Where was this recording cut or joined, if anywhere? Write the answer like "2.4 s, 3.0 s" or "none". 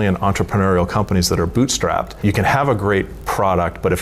2.1 s